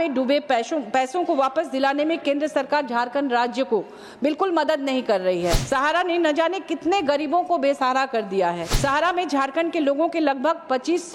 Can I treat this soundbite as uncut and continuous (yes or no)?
no